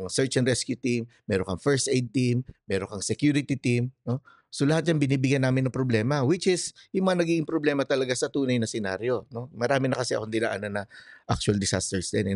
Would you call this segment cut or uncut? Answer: uncut